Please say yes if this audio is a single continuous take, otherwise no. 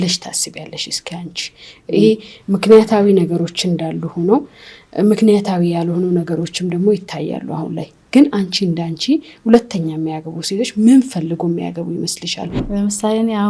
no